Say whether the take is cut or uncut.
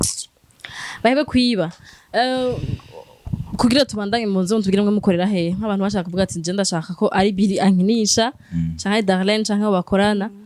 uncut